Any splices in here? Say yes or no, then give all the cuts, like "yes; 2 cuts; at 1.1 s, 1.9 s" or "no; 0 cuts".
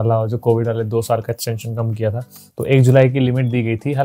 no; 0 cuts